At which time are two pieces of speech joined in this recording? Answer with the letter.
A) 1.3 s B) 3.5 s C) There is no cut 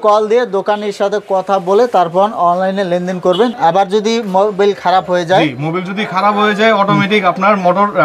B